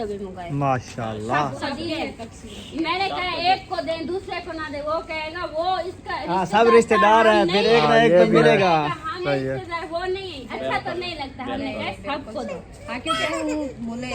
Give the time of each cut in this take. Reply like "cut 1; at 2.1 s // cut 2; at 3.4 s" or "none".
cut 1; at 1.6 s // cut 2; at 9.2 s // cut 3; at 13.3 s